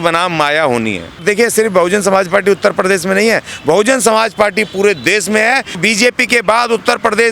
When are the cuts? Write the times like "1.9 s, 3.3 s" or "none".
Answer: 1.2 s, 5.8 s